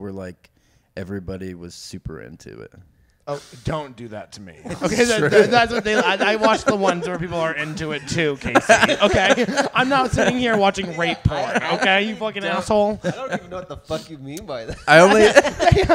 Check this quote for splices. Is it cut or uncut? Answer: uncut